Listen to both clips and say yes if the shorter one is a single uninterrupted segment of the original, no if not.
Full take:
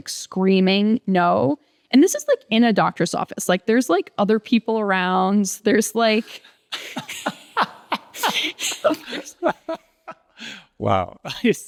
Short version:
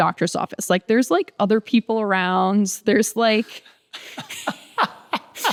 yes